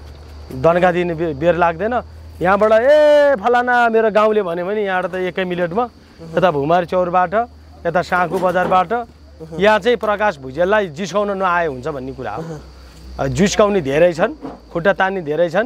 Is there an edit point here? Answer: no; 0 cuts

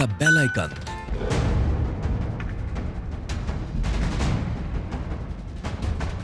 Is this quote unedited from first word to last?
no; 1 cut; at 1.0 s

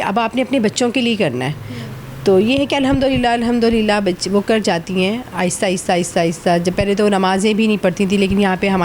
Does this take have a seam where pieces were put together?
no; 0 cuts

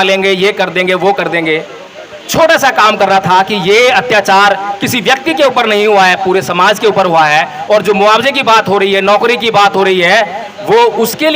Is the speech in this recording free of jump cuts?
yes; 0 cuts

